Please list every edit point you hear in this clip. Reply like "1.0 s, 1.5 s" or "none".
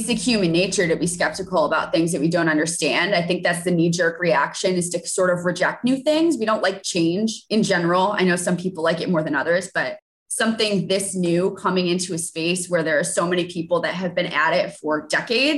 7.4 s